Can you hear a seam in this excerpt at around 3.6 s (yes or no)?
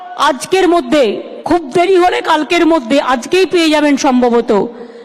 no